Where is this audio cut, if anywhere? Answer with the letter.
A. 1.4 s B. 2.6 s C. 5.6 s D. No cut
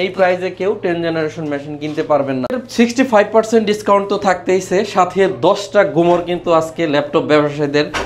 B